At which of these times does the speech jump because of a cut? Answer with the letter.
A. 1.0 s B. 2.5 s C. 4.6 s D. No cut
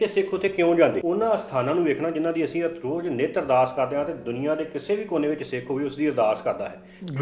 A